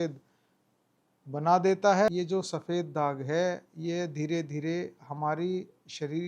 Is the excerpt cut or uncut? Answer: cut